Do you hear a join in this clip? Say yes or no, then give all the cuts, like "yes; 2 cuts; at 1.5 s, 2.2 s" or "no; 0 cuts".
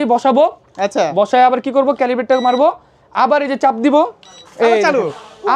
no; 0 cuts